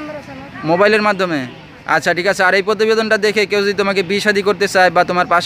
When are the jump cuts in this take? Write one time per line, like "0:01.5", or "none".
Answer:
none